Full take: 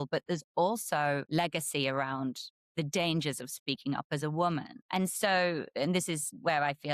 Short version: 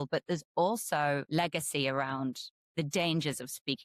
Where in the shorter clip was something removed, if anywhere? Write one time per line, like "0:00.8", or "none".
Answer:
none